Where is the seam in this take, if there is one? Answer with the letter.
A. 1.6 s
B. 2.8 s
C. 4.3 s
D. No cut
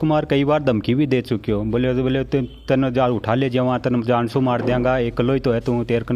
D